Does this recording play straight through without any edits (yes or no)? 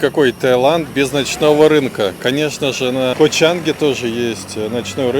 no